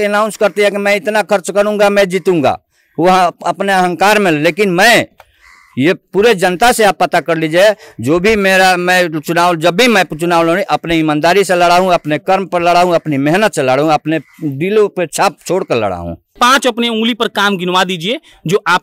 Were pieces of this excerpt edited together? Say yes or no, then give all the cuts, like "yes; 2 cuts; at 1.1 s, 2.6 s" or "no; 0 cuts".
yes; 1 cut; at 16.2 s